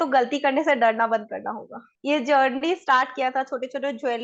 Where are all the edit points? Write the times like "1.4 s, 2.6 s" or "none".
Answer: 1.9 s